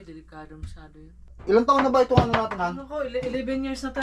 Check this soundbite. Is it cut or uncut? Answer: cut